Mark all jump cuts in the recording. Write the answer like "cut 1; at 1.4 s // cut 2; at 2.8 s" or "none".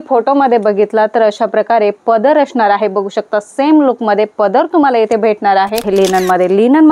cut 1; at 5.8 s